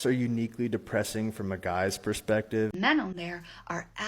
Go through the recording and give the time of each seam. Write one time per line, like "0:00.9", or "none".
0:02.9